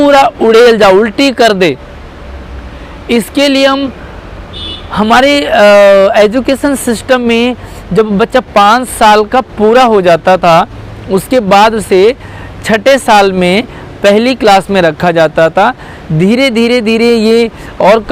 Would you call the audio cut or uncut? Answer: uncut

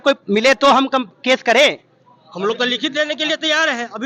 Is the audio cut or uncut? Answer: uncut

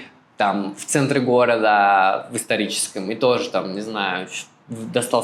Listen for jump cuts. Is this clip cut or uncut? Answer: uncut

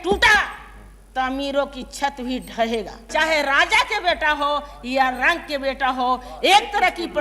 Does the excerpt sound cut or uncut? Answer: cut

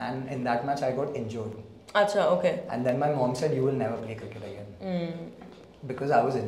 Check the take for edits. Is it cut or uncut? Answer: uncut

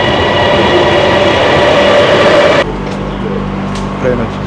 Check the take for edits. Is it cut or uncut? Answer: cut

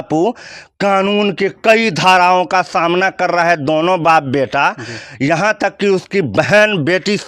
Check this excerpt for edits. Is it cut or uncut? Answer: uncut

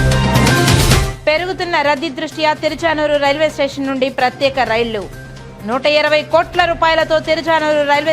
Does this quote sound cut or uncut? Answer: cut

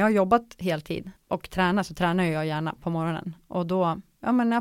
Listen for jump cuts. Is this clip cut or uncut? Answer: cut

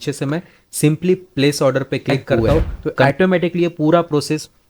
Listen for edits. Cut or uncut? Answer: cut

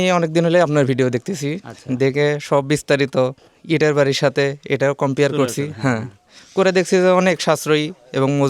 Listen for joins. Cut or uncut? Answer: uncut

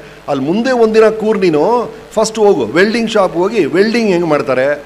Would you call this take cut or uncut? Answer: uncut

